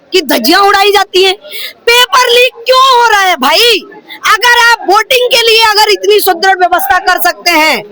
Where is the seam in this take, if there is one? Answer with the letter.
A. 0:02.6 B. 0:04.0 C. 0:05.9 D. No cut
D